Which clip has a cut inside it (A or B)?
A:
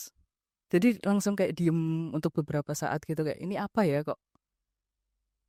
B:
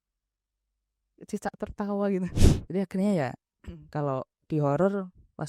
B